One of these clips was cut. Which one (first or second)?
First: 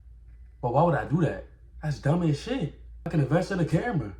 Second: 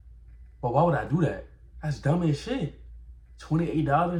first